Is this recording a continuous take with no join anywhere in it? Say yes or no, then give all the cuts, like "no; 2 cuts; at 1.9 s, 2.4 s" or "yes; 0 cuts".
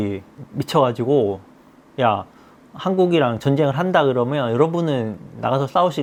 yes; 0 cuts